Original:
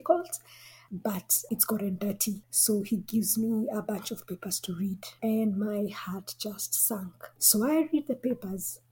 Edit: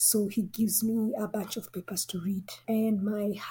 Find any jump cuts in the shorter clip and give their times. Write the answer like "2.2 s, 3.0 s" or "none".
none